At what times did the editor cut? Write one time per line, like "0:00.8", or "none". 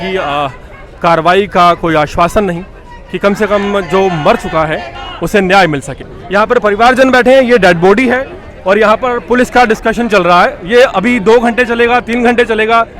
0:06.6